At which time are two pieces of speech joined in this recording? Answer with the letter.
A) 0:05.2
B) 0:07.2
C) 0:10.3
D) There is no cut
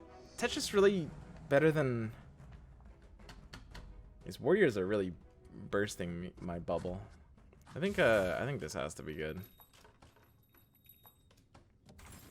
C